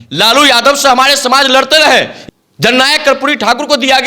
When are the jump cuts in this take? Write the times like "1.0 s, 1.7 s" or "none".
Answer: 2.2 s

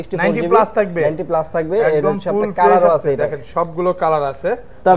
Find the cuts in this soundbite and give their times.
none

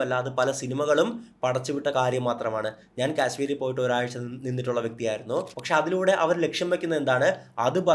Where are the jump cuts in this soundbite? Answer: 5.6 s

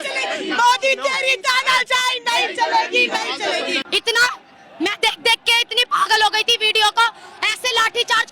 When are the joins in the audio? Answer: 3.8 s

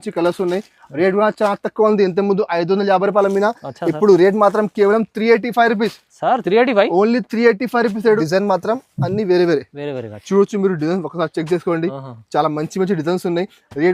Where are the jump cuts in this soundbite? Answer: 8.2 s

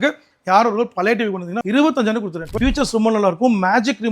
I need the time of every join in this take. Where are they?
1.5 s, 2.6 s

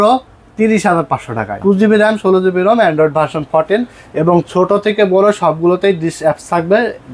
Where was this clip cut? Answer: 1.5 s

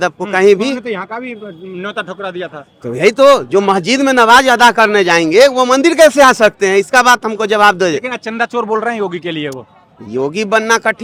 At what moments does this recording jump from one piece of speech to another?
none

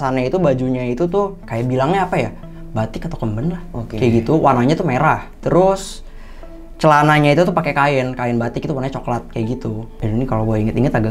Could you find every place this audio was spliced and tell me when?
1.4 s, 5.3 s, 9.9 s

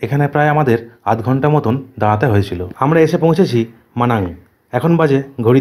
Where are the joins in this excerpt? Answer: 2.6 s

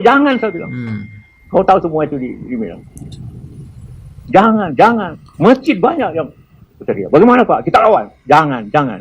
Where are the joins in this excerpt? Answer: 5.2 s

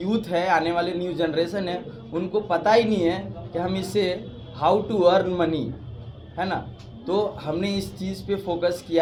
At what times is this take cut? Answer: none

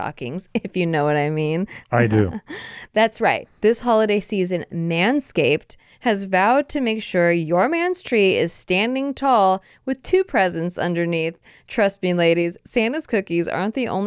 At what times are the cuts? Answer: none

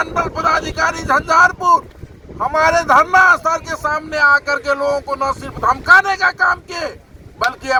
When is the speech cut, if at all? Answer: none

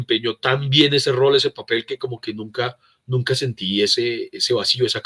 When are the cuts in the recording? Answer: none

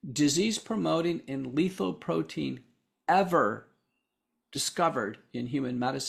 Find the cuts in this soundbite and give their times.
none

